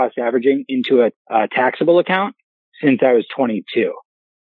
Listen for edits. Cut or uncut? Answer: cut